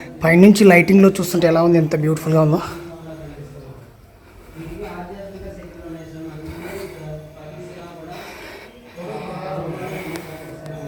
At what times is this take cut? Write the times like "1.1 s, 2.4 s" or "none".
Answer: none